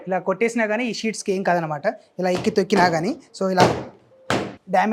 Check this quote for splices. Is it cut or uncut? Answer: uncut